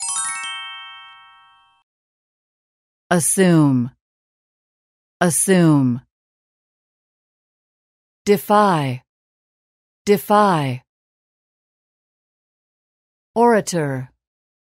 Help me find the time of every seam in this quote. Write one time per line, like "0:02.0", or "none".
none

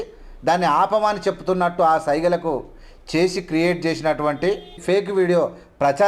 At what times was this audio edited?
0:04.8

